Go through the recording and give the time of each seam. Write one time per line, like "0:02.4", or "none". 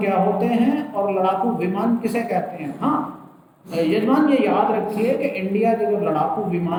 none